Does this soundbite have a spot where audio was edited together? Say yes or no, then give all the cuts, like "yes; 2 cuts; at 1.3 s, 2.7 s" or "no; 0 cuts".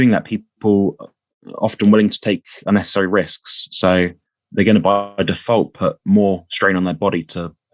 no; 0 cuts